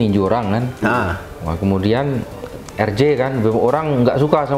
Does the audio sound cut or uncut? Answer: uncut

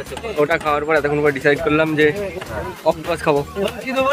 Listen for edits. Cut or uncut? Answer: uncut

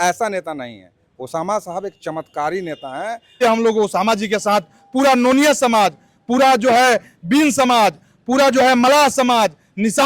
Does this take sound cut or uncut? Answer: cut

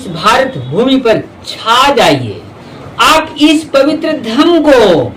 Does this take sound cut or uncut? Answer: uncut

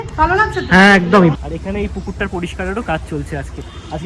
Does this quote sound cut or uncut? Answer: cut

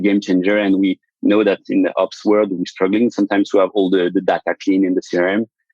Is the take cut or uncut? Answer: cut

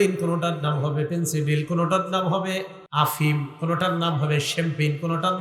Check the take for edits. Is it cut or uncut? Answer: cut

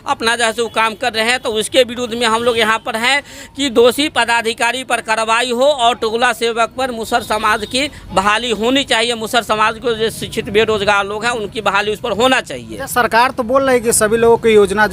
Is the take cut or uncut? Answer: uncut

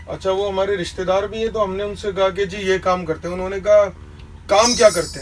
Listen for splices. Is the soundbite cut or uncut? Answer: uncut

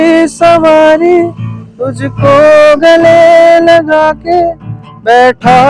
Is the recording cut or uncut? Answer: uncut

